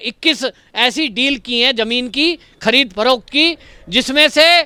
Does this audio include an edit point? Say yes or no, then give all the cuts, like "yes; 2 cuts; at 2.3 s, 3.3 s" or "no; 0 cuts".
no; 0 cuts